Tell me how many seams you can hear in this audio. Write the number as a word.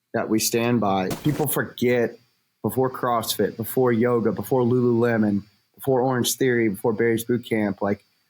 one